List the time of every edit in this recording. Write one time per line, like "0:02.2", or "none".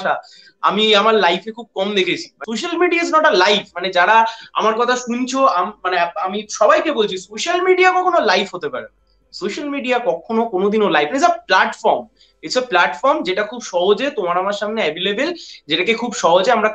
0:02.3